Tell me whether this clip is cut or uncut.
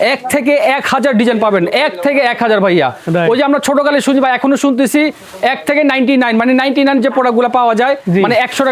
uncut